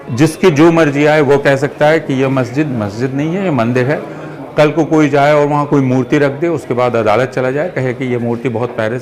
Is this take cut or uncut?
uncut